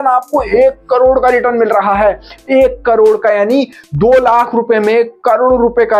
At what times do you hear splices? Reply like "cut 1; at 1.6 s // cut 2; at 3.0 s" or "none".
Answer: none